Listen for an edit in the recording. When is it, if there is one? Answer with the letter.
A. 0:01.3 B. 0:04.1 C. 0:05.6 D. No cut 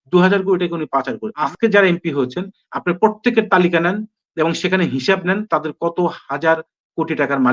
A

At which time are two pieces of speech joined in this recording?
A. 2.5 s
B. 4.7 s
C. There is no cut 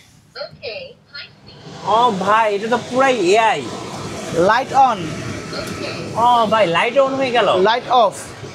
C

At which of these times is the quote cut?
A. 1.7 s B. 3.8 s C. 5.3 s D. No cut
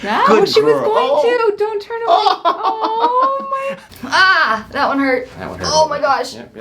B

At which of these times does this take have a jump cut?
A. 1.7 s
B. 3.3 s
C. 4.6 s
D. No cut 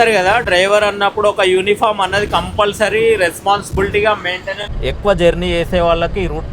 C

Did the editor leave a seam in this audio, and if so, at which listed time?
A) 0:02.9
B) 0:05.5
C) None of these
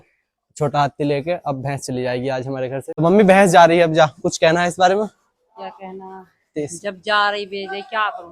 A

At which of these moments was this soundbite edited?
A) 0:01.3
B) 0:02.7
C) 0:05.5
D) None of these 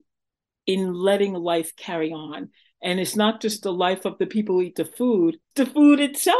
C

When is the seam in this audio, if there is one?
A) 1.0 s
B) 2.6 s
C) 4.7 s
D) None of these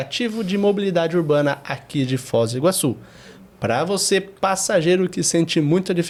D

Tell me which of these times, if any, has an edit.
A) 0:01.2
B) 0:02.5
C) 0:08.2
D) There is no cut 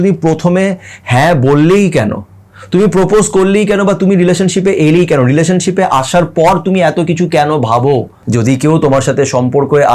C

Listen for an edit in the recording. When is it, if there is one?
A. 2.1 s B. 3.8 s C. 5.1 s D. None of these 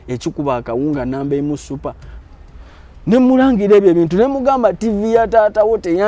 A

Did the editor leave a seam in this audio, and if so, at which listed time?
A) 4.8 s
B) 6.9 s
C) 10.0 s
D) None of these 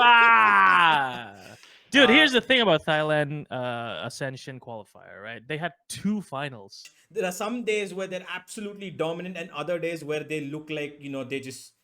B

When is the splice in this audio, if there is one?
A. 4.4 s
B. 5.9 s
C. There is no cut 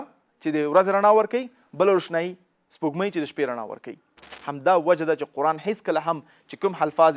A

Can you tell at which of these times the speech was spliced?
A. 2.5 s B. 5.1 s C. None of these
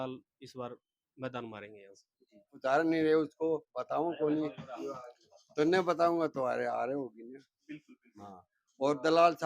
A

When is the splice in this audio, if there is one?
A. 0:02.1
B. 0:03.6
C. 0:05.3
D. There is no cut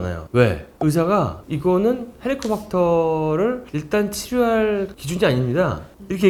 D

